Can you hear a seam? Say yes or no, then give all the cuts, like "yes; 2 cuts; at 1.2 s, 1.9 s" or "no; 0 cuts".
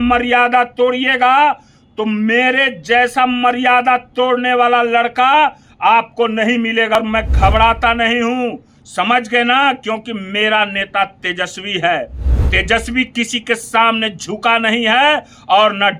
yes; 1 cut; at 7.0 s